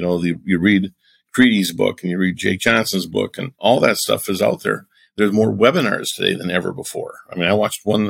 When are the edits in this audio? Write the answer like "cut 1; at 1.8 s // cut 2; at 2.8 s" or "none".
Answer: cut 1; at 3.6 s